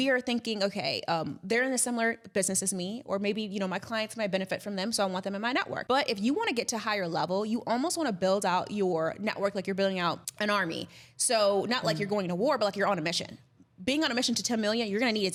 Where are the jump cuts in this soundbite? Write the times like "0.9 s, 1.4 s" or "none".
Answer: none